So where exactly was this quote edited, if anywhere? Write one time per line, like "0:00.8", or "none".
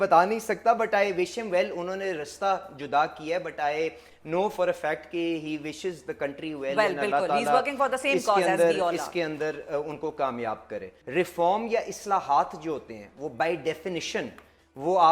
0:10.9